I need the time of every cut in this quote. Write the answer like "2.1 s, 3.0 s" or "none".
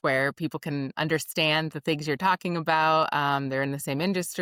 none